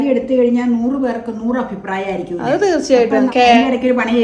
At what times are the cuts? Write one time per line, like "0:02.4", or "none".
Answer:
0:03.3